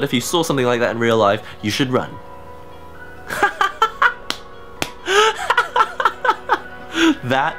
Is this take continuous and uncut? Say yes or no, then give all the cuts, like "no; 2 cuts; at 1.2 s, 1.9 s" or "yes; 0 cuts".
yes; 0 cuts